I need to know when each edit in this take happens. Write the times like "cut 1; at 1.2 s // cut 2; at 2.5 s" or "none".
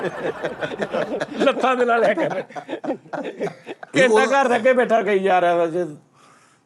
cut 1; at 3.8 s